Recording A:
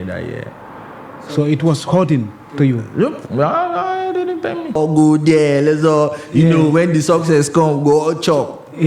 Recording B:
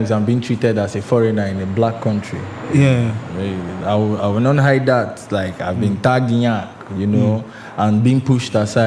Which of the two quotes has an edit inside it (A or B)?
A